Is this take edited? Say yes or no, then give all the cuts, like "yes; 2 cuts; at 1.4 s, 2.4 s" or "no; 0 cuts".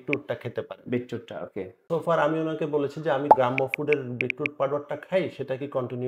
yes; 2 cuts; at 1.8 s, 3.3 s